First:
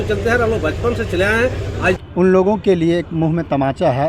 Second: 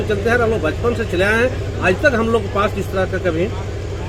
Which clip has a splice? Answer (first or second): first